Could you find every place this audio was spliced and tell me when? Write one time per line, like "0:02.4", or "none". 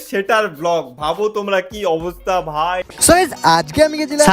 0:02.9